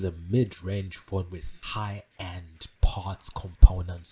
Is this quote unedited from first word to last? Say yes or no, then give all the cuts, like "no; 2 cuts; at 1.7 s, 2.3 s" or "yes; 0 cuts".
no; 1 cut; at 1.5 s